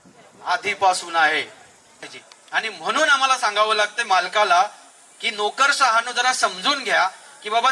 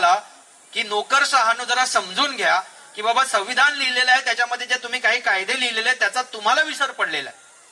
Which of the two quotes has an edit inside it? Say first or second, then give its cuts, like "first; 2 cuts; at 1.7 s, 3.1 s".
first; 1 cut; at 2.1 s